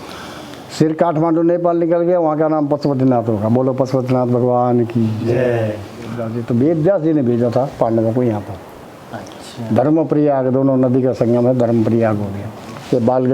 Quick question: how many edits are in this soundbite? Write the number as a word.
one